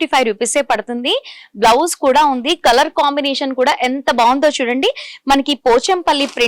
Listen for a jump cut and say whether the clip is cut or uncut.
uncut